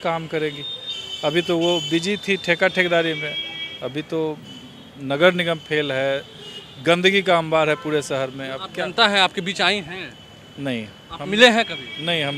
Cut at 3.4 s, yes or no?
no